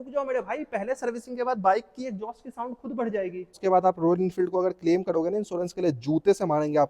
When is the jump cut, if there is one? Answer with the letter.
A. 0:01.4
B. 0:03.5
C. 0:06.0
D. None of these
B